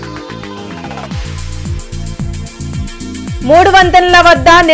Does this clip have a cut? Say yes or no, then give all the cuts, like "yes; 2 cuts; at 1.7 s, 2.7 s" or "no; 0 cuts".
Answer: yes; 2 cuts; at 1.1 s, 2.6 s